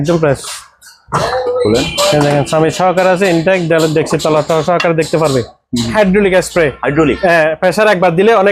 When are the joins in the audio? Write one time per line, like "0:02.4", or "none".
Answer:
0:05.9